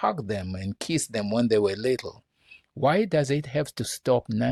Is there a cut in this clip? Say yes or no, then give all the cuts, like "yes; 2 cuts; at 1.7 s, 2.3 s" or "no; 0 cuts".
no; 0 cuts